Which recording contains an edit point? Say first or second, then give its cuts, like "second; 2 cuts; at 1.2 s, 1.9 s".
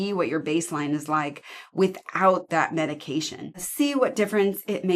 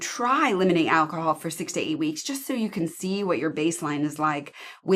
first; 1 cut; at 3.7 s